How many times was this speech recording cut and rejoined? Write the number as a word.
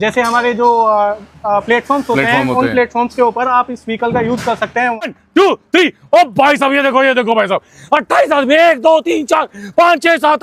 one